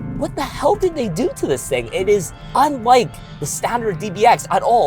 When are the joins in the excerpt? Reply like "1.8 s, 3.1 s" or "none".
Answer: 2.4 s